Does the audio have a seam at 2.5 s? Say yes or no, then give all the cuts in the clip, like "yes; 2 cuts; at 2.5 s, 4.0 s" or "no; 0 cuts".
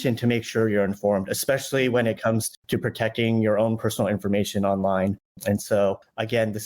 yes; 1 cut; at 2.5 s